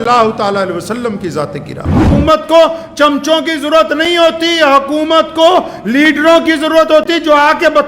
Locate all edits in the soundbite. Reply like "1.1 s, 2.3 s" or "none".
2.1 s